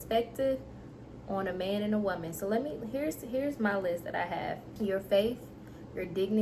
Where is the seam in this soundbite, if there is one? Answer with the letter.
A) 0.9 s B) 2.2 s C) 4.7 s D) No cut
C